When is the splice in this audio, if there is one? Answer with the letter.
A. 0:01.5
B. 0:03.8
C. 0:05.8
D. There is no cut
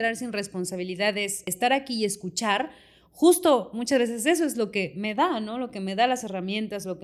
A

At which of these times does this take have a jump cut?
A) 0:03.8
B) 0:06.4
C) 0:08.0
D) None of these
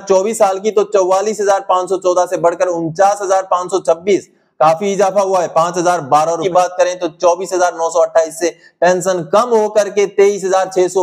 B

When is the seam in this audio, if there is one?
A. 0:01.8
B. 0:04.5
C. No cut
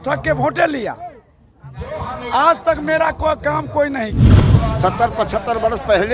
B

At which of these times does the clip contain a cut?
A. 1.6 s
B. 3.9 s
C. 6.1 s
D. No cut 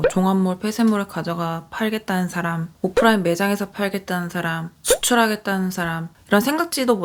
D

